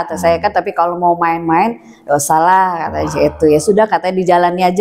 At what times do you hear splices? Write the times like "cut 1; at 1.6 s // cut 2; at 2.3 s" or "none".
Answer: none